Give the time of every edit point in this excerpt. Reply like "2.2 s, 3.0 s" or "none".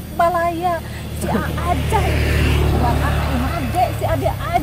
3.5 s